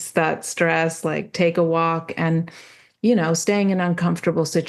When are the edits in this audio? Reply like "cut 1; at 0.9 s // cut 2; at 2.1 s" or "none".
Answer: none